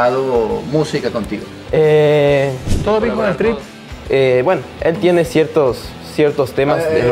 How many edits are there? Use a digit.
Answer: 1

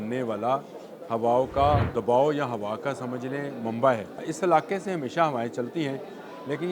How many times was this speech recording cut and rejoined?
2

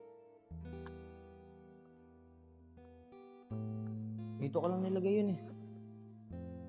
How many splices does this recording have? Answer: 2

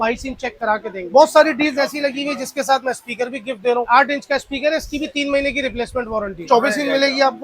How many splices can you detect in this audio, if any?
3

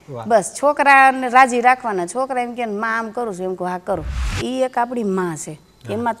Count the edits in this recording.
1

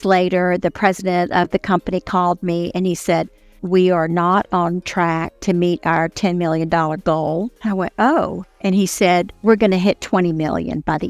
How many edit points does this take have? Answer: 3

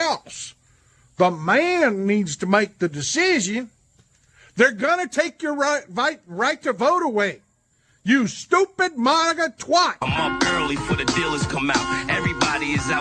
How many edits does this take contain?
1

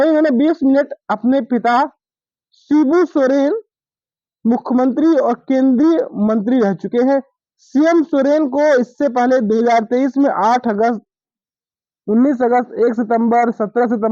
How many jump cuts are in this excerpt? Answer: 0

